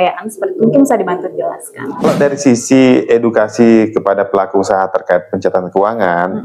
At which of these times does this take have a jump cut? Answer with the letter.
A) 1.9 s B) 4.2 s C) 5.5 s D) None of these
A